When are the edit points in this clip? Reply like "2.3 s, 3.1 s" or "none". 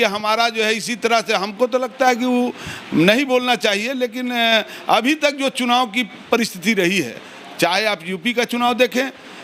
none